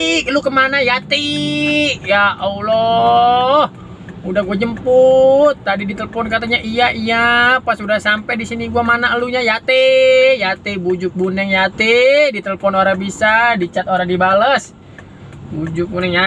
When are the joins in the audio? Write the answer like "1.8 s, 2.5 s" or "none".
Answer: none